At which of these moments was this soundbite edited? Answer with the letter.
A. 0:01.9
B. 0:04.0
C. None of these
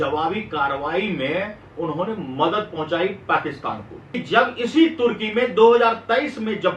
B